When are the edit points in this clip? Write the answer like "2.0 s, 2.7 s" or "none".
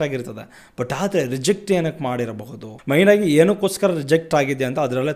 2.6 s